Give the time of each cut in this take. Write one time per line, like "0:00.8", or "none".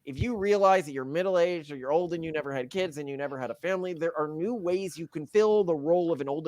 0:05.2